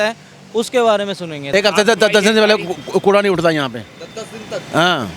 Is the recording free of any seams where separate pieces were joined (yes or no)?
no